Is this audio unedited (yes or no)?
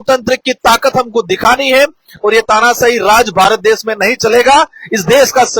yes